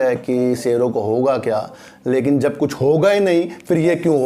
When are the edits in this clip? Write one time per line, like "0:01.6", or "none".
none